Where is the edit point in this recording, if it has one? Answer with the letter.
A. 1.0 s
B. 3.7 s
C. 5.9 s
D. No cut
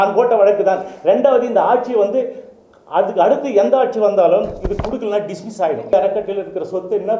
C